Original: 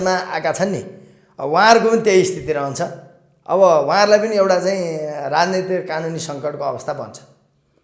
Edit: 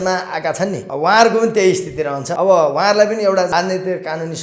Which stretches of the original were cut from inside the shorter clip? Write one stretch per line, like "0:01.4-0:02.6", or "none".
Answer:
0:00.9-0:01.4
0:02.7-0:03.4
0:04.6-0:05.3